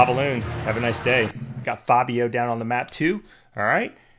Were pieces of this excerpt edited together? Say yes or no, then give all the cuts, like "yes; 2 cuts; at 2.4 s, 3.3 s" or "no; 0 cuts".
yes; 1 cut; at 1.6 s